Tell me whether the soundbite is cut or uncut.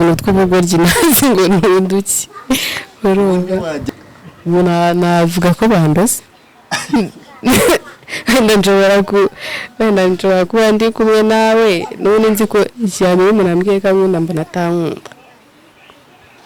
cut